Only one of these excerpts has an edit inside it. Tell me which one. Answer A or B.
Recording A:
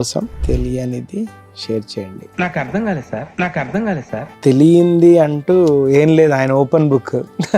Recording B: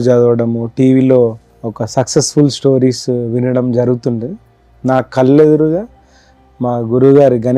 A